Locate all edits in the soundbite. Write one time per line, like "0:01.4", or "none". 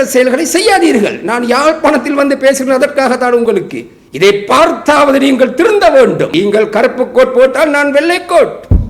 0:06.3